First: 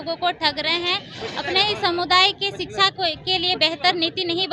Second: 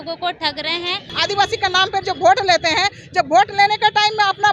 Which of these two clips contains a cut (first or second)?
second